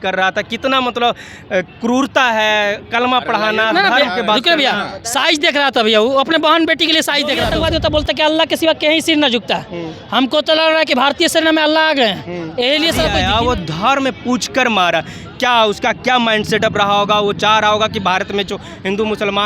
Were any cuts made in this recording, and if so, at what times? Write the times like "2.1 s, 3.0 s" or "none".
7.5 s, 13.2 s